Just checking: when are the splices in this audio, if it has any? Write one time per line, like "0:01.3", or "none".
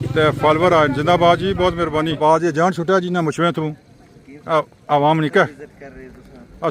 0:02.2